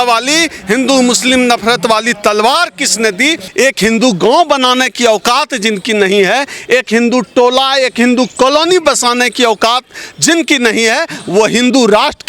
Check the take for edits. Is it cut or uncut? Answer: cut